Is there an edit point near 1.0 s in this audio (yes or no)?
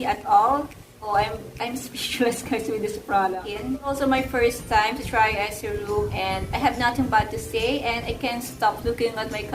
no